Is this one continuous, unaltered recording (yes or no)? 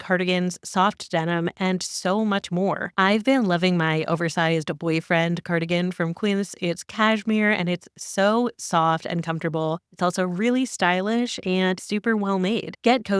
no